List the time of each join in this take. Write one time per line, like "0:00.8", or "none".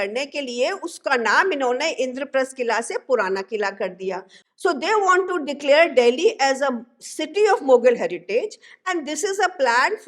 0:04.3